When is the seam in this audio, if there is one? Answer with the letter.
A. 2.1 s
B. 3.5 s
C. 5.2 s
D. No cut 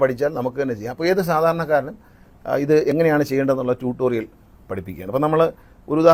D